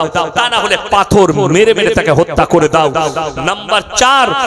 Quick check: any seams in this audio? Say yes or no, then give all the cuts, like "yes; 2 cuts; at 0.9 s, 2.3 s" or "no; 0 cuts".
no; 0 cuts